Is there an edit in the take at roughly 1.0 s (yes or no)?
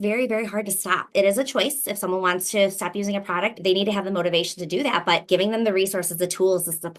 yes